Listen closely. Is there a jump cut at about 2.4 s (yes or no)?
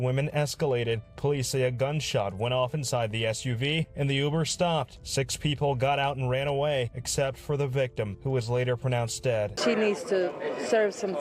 no